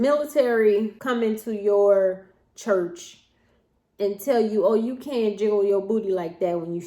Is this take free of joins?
no; 1 cut; at 1.0 s

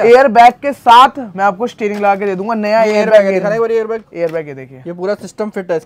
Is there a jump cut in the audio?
no; 0 cuts

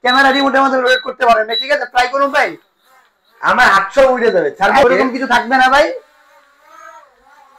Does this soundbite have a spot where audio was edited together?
yes; 1 cut; at 4.8 s

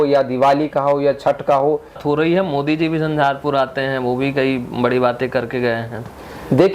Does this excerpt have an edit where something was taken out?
yes; 1 cut; at 2.0 s

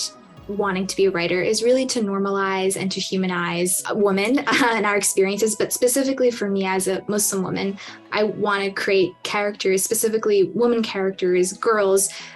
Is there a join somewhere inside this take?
yes; 2 cuts; at 3.8 s, 7.9 s

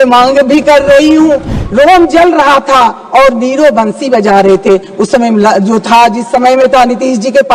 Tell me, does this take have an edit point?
yes; 1 cut; at 1.5 s

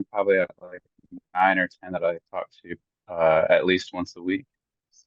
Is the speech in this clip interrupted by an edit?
no; 0 cuts

